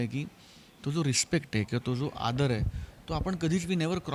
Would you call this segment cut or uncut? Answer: uncut